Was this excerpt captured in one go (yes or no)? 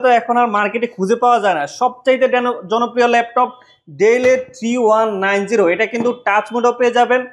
yes